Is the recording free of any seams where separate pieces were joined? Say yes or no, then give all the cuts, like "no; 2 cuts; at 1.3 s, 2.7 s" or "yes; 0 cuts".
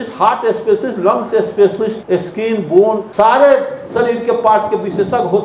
no; 2 cuts; at 2.0 s, 3.1 s